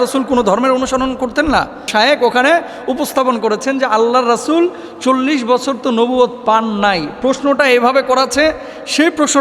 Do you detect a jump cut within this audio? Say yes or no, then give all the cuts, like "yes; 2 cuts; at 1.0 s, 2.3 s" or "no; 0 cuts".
yes; 1 cut; at 1.9 s